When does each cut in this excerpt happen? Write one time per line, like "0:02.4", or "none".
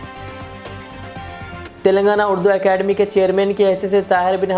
none

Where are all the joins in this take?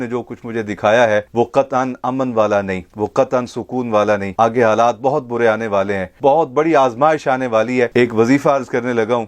0:06.0
0:07.9

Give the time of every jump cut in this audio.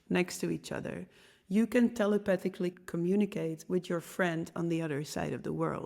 0:02.8

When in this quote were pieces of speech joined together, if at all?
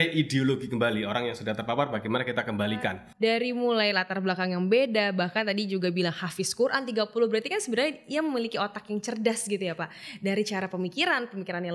0:03.0

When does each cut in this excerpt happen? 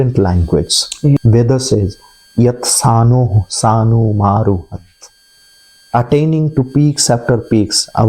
0:01.2

